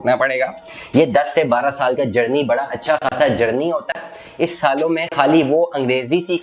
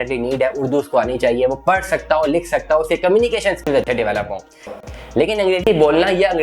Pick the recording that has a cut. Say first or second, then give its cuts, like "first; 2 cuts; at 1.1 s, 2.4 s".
second; 1 cut; at 4.6 s